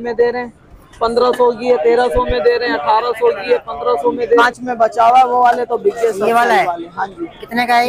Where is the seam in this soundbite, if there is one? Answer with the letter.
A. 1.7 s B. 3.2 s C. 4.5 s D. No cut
C